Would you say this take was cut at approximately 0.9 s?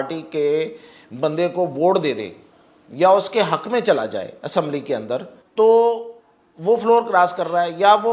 no; 1 cut; at 5.4 s

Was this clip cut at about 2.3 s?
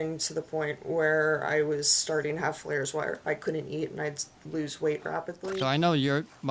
no; 1 cut; at 5.3 s

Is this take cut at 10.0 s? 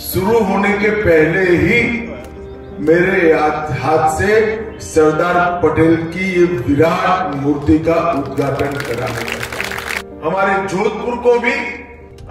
yes; 1 cut; at 10.0 s

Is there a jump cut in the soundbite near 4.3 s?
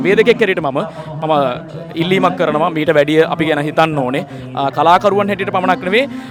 no; 0 cuts

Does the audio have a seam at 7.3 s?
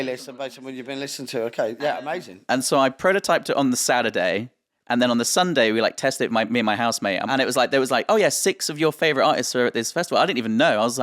yes; 1 cut; at 7.3 s

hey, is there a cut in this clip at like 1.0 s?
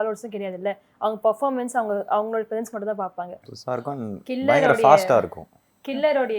no; 1 cut; at 3.5 s

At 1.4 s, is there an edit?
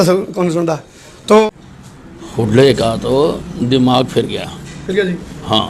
yes; 1 cut; at 1.4 s

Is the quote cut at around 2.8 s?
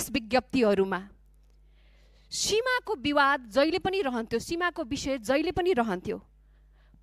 no; 0 cuts

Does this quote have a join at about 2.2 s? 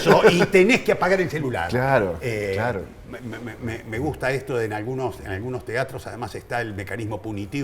no; 0 cuts

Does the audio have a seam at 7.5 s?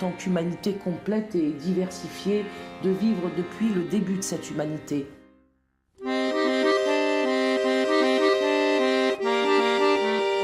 no; 1 cut; at 1.8 s

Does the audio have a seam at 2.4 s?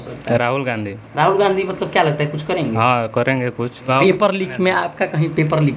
no; 1 cut; at 3.9 s

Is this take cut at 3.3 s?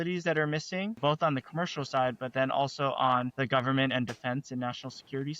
yes; 2 cuts; at 0.9 s, 3.3 s

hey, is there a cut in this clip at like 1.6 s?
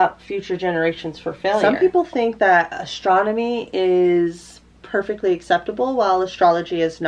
yes; 1 cut; at 1.6 s

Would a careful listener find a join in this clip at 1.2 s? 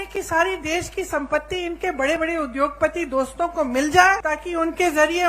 no; 1 cut; at 4.3 s

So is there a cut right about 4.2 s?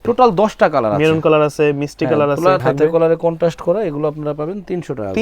no; 1 cut; at 2.6 s

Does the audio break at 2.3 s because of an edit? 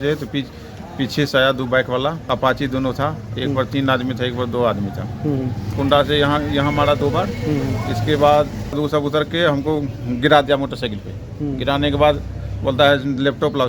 yes; 3 cuts; at 2.3 s, 5.7 s, 8.8 s

